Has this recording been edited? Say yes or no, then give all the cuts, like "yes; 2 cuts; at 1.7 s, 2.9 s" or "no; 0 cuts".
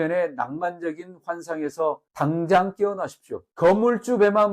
no; 0 cuts